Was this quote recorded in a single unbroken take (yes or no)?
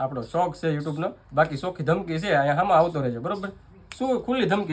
yes